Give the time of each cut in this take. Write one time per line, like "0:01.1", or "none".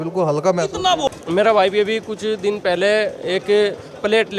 0:01.1